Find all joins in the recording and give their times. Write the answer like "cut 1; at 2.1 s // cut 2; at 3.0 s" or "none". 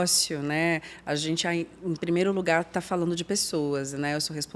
none